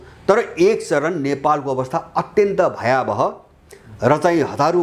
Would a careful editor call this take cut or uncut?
uncut